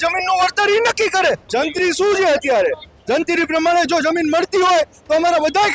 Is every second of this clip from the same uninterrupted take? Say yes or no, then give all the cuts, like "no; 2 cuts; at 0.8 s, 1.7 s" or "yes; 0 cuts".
no; 1 cut; at 1.4 s